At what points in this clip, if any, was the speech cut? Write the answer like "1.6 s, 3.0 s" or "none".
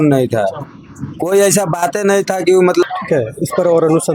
2.8 s